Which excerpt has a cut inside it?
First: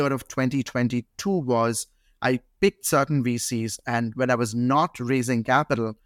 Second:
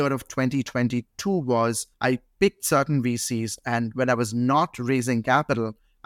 second; 1 cut; at 1.9 s

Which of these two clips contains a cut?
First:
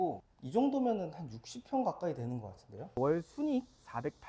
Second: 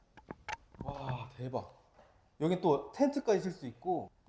first; 1 cut; at 2.9 s

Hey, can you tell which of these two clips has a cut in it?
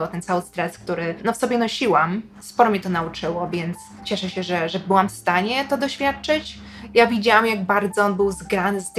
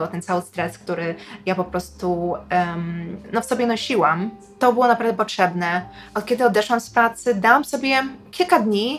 first; 4 cuts; at 1.2 s, 2.3 s, 3.9 s, 6.7 s

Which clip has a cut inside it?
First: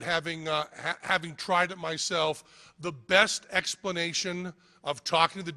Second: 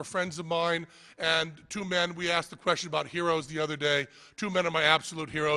first; 1 cut; at 1.9 s

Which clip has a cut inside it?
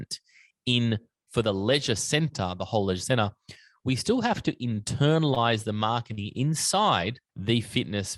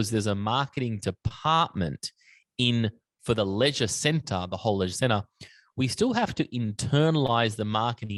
first; 1 cut; at 7.3 s

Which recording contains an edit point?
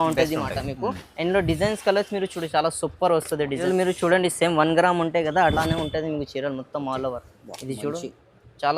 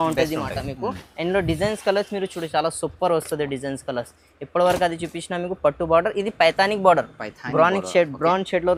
first; 1 cut; at 3.6 s

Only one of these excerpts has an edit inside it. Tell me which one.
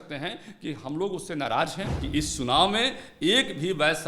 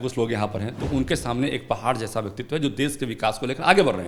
first; 1 cut; at 1.9 s

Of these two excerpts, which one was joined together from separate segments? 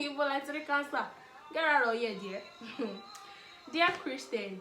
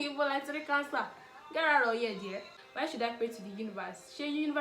second; 1 cut; at 2.6 s

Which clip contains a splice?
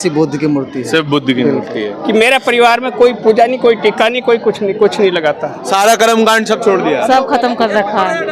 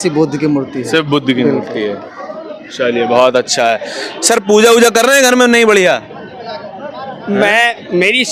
first; 2 cuts; at 2.0 s, 5.6 s

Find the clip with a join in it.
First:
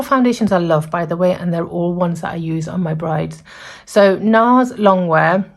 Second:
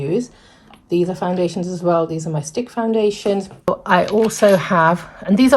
second; 1 cut; at 3.7 s

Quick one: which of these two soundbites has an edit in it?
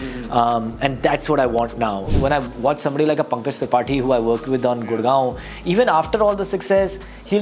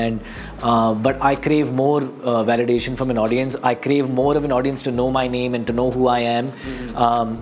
first; 1 cut; at 2.1 s

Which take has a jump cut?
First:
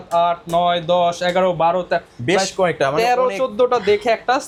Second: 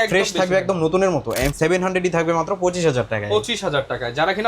second; 1 cut; at 1.5 s

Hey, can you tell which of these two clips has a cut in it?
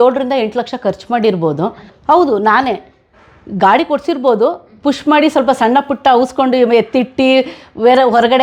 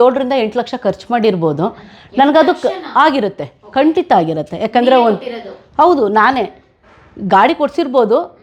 first; 1 cut; at 1.9 s

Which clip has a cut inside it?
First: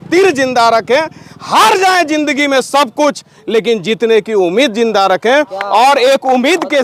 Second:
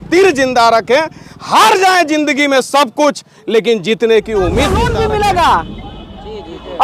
second; 1 cut; at 4.8 s

